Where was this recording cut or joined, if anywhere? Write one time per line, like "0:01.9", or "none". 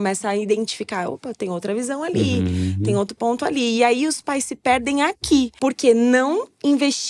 0:05.5